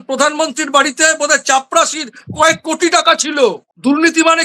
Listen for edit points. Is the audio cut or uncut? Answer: uncut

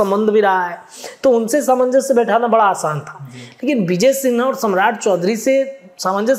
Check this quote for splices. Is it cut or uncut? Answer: uncut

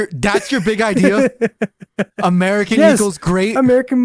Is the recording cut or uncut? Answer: uncut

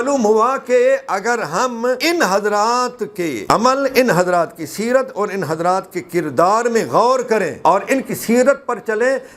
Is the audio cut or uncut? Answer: cut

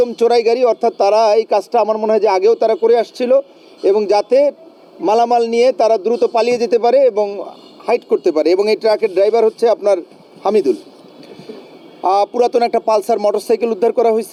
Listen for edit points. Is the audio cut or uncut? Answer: uncut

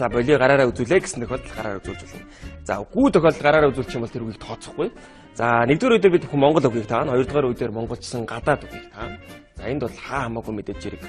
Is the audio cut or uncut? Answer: uncut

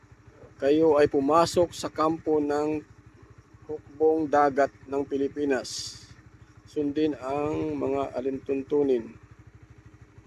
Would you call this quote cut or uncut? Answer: uncut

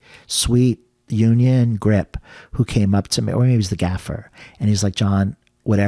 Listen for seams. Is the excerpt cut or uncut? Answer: uncut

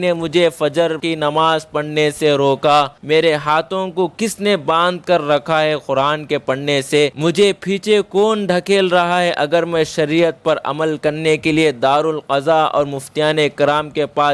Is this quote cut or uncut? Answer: uncut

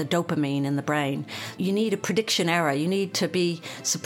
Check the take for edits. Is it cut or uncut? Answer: cut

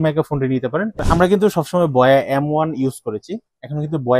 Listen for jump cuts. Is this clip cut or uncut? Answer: cut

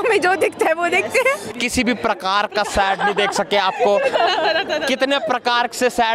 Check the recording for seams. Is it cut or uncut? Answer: cut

